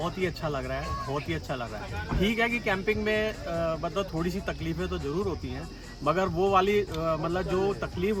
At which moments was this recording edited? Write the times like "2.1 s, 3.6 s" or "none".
none